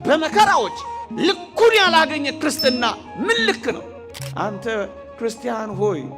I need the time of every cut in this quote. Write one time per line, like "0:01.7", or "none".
0:04.1